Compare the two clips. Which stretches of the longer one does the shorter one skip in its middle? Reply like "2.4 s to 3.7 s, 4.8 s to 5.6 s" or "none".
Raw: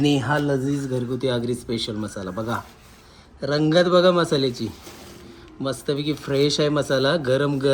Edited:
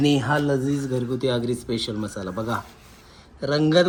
none